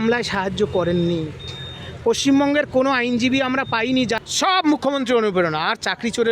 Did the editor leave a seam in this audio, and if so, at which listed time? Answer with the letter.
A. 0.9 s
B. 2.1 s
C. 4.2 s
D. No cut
C